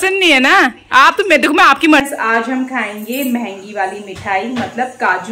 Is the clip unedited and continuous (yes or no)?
no